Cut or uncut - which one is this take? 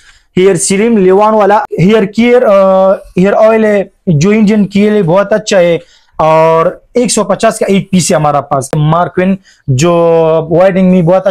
cut